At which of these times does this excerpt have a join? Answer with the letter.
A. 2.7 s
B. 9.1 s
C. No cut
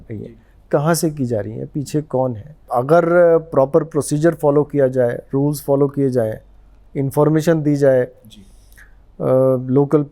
A